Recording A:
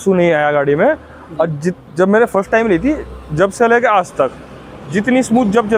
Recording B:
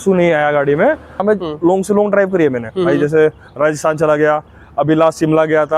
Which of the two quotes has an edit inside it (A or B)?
B